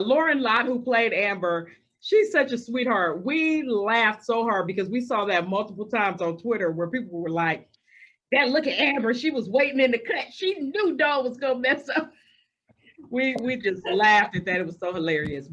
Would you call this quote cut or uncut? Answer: uncut